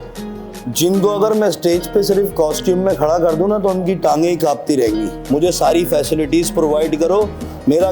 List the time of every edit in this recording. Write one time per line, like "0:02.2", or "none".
0:05.1